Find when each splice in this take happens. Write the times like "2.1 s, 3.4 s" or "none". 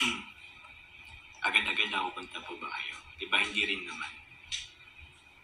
none

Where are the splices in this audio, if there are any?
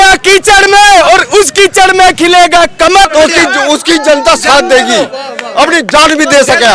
3.1 s

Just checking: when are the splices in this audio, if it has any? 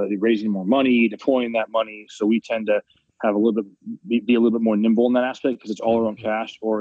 none

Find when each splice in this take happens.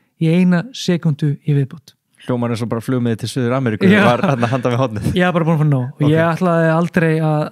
none

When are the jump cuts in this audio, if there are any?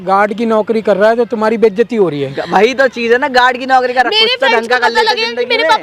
none

